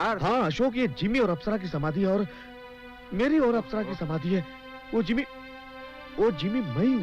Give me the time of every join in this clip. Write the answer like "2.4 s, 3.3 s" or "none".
none